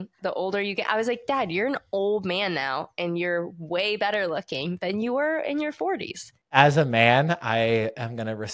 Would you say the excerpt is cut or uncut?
cut